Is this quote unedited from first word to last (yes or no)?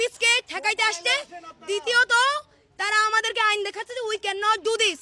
yes